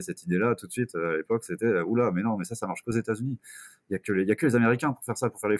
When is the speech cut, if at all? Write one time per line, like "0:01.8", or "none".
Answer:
none